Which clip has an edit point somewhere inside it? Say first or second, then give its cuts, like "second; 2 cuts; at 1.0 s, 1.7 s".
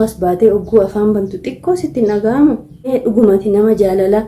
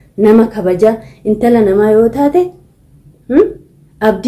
first; 1 cut; at 2.9 s